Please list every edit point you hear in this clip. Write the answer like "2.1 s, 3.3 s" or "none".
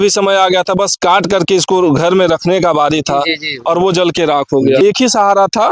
4.8 s